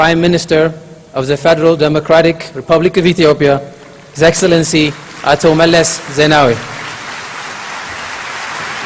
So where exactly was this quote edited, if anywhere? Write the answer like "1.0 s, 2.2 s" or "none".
7.0 s

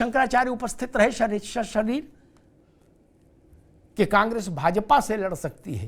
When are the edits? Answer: 2.6 s

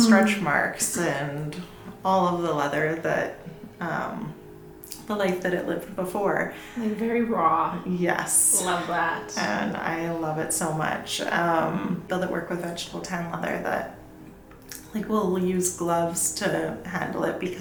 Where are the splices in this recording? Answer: none

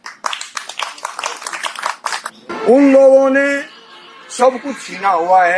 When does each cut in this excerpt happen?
2.3 s

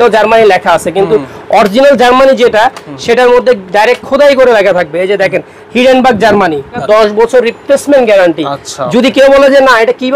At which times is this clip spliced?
6.8 s

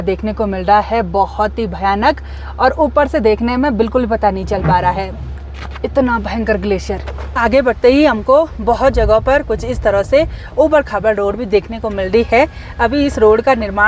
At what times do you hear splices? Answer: none

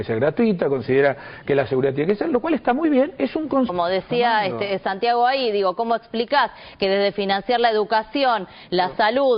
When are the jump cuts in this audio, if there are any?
none

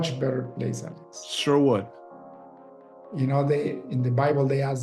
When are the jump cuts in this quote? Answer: none

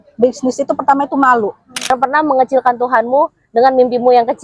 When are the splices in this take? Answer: 1.9 s

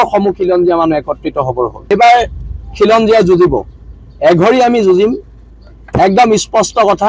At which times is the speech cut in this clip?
1.9 s

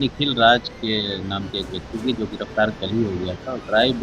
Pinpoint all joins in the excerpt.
none

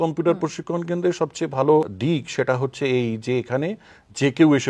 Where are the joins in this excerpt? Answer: 1.9 s

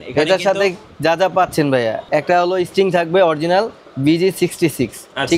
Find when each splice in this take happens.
2.0 s

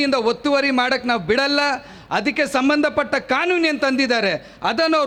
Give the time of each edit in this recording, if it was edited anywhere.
none

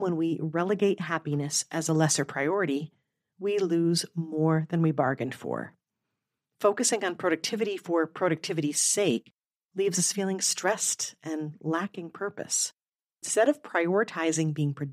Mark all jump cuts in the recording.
13.3 s

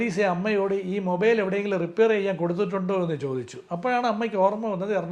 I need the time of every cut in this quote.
none

